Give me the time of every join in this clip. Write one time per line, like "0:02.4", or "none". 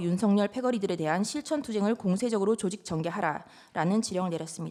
none